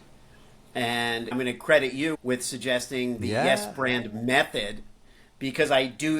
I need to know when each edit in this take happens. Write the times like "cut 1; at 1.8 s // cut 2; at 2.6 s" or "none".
cut 1; at 1.3 s